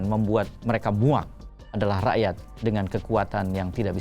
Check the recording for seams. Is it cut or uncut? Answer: cut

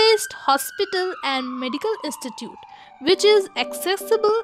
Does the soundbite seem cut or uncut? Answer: uncut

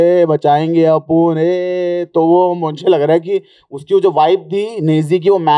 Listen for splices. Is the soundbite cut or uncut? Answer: uncut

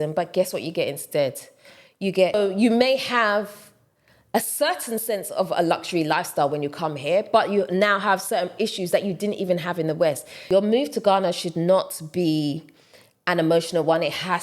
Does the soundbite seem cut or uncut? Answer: cut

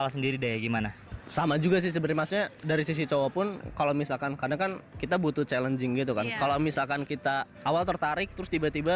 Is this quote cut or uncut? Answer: uncut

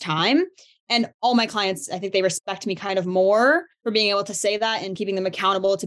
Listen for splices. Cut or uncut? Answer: cut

